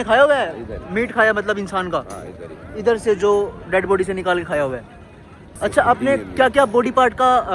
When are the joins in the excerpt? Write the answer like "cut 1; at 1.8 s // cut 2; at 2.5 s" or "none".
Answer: cut 1; at 5.6 s